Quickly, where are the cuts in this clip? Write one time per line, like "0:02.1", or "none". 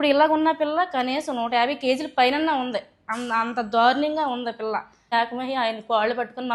0:05.1